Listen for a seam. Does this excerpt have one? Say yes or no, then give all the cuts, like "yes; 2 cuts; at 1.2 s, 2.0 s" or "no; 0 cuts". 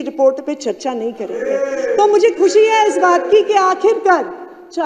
no; 0 cuts